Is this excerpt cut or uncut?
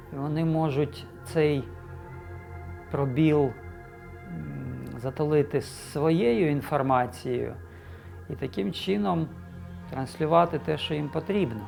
uncut